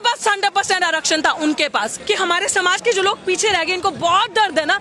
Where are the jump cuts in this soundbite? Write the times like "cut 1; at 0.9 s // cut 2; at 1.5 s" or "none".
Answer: cut 1; at 1.9 s